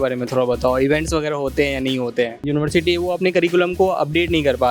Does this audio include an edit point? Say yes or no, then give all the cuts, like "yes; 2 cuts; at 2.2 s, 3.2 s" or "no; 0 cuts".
yes; 1 cut; at 2.5 s